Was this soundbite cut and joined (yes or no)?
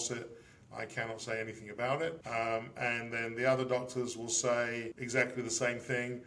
yes